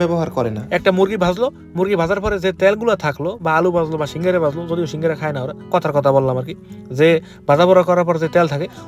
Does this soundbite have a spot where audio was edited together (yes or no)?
no